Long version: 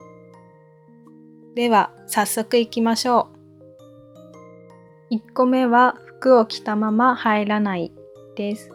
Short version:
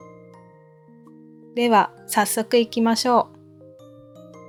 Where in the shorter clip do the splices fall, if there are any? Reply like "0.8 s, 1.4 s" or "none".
none